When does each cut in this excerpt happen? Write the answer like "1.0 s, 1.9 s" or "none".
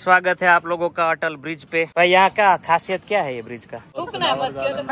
1.9 s, 3.9 s